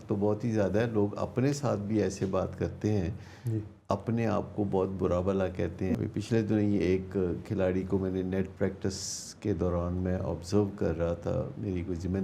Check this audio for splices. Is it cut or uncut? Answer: cut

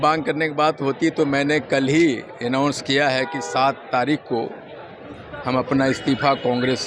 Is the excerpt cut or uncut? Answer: uncut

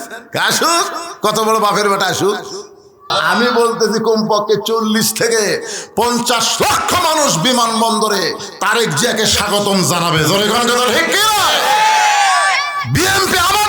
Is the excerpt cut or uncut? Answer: cut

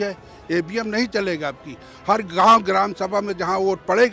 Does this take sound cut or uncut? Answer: uncut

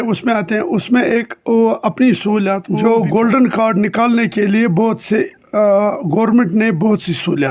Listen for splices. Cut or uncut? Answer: cut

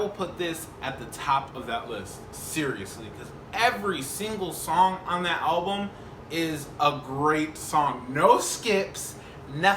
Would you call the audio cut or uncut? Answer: uncut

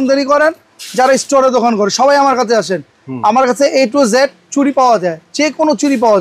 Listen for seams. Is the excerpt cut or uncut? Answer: uncut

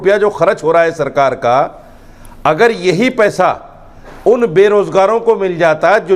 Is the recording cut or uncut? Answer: uncut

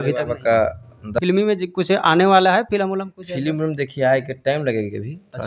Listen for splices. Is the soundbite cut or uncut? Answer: cut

